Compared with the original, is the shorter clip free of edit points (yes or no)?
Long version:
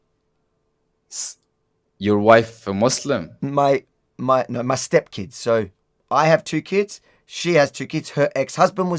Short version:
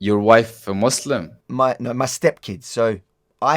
no